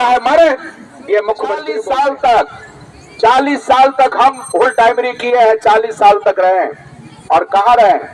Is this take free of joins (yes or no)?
no